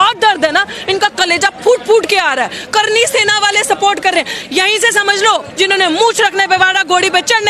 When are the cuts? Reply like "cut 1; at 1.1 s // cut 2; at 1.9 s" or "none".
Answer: cut 1; at 5.5 s

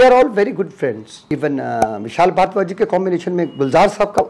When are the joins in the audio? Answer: cut 1; at 1.1 s

